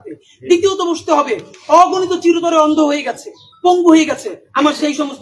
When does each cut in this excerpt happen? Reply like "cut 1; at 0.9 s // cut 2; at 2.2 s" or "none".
none

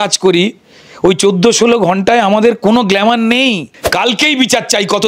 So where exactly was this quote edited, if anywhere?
cut 1; at 3.8 s

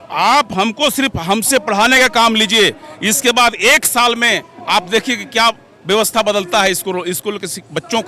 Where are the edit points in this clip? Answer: none

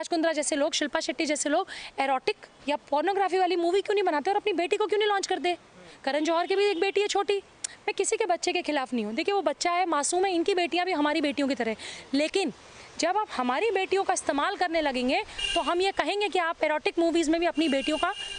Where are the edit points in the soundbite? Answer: none

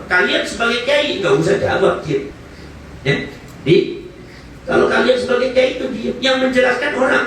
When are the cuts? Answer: none

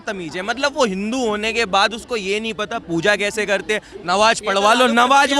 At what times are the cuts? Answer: none

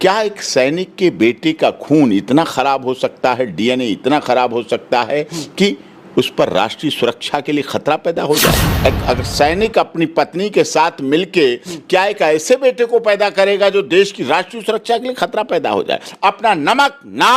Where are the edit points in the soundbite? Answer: cut 1; at 8.7 s // cut 2; at 16.1 s

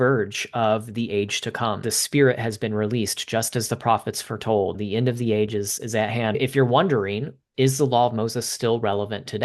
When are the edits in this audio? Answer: cut 1; at 1.9 s // cut 2; at 4.8 s // cut 3; at 6.4 s // cut 4; at 7.4 s

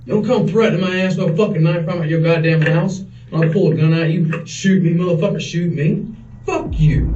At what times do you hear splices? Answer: none

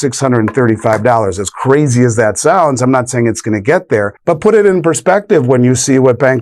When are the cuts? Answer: cut 1; at 4.1 s

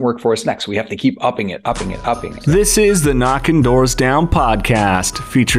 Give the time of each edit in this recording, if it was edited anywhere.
cut 1; at 2.3 s

